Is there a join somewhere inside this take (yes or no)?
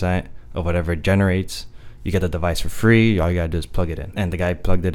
yes